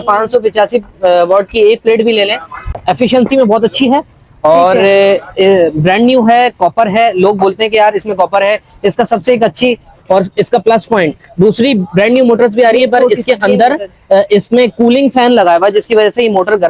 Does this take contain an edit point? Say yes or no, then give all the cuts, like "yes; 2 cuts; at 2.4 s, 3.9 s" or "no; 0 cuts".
yes; 1 cut; at 2.8 s